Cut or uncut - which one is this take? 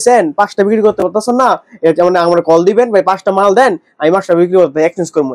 uncut